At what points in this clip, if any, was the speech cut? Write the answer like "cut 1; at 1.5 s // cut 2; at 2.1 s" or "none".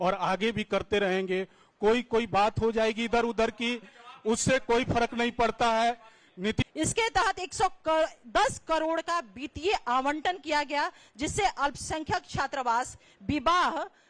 cut 1; at 6.6 s